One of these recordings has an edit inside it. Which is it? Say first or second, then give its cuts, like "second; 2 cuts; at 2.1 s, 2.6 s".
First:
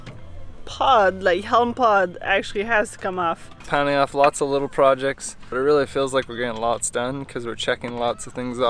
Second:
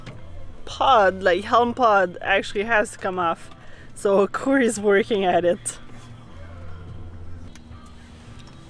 first; 2 cuts; at 3.5 s, 5.4 s